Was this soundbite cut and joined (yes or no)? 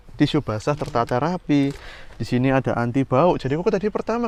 no